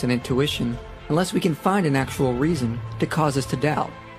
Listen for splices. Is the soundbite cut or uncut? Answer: uncut